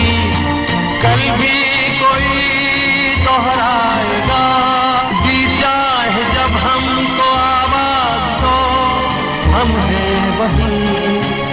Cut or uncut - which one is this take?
uncut